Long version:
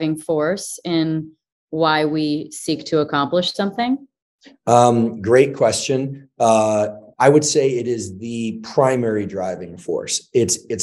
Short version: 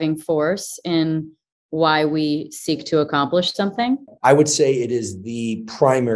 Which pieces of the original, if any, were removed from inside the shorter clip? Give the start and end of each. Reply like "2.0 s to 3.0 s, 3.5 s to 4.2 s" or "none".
4.1 s to 7.1 s